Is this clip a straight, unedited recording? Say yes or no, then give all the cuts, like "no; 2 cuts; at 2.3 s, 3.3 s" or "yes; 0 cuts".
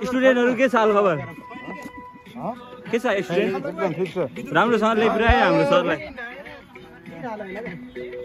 yes; 0 cuts